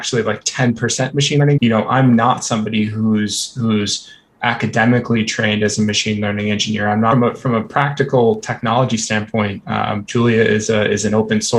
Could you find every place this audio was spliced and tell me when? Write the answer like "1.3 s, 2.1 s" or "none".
1.6 s, 7.1 s